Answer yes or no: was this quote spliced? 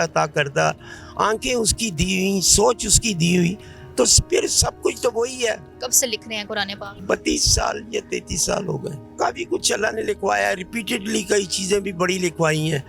yes